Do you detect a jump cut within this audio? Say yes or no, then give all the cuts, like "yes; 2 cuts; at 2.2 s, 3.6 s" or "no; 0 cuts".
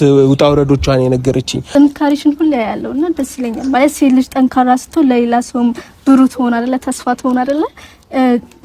yes; 1 cut; at 1.5 s